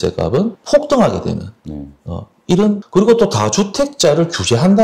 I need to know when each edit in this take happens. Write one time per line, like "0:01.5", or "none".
0:02.8